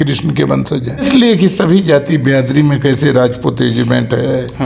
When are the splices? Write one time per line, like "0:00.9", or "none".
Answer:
0:01.1